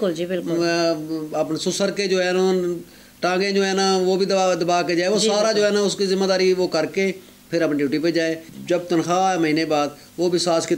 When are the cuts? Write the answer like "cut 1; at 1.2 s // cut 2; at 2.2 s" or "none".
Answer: cut 1; at 8.5 s